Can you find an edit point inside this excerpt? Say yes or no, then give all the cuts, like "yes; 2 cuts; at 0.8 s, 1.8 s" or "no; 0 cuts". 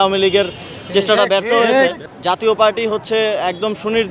yes; 1 cut; at 2.0 s